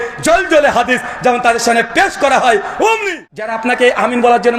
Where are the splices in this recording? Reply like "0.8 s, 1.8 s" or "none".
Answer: 3.5 s